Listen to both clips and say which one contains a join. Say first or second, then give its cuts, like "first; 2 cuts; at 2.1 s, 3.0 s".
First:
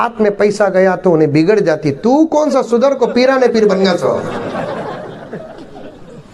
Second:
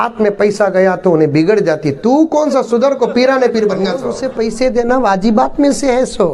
second; 1 cut; at 4.1 s